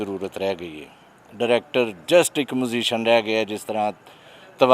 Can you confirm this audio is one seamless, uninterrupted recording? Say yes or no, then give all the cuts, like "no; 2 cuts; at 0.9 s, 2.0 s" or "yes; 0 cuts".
yes; 0 cuts